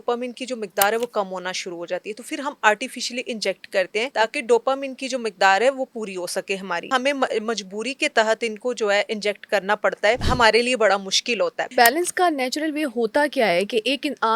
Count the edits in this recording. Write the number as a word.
four